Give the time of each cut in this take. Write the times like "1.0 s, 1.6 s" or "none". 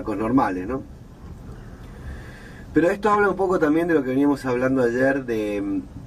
none